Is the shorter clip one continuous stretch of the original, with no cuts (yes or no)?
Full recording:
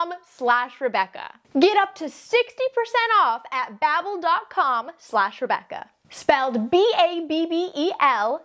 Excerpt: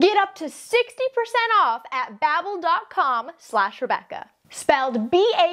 yes